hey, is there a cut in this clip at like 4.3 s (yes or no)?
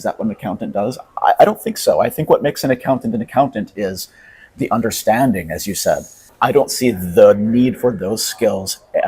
no